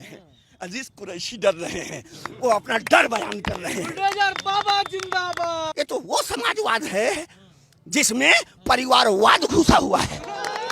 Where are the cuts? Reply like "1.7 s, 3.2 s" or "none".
5.7 s